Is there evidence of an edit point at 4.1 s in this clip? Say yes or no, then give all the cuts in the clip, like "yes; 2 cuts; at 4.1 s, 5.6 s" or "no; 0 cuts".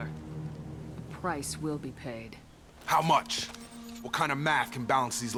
no; 0 cuts